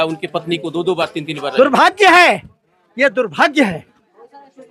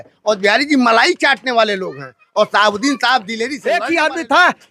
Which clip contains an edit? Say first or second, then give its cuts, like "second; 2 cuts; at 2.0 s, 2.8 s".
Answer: second; 1 cut; at 3.5 s